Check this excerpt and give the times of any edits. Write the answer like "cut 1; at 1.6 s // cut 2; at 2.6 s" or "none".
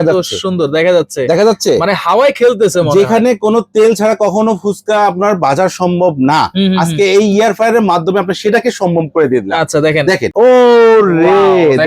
cut 1; at 10.3 s